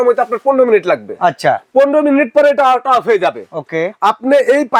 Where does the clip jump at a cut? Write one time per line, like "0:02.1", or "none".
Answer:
none